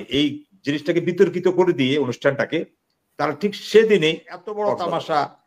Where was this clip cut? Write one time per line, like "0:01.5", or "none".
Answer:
0:04.6

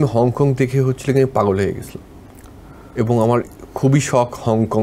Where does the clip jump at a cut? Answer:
none

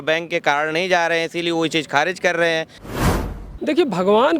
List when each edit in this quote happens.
0:03.2

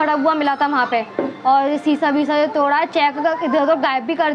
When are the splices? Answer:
none

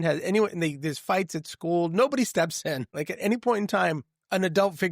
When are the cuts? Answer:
0:02.9

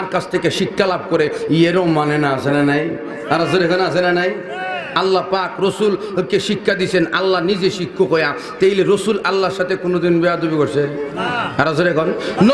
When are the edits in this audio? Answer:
none

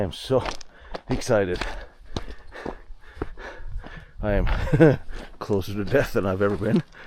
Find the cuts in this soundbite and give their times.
none

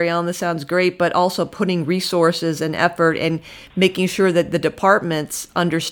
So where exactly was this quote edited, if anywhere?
none

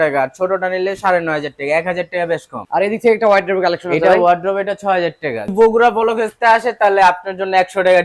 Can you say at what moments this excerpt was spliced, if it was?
0:02.6
0:05.5

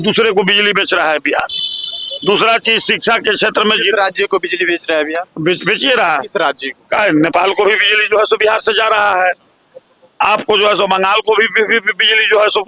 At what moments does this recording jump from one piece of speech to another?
none

